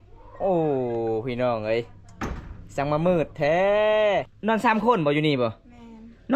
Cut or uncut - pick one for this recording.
cut